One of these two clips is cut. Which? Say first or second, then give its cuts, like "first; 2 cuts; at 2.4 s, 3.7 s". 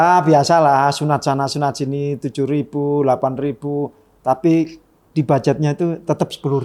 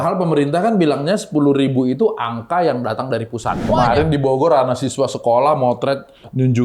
second; 1 cut; at 3.6 s